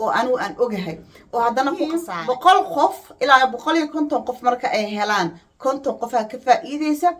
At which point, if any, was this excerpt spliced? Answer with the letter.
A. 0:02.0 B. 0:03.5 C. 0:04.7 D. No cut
A